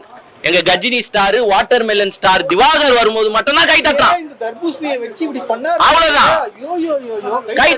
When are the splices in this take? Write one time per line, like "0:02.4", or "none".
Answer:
none